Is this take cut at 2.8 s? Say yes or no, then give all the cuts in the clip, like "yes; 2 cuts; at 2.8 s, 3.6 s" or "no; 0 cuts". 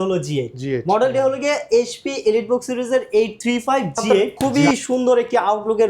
no; 1 cut; at 4.3 s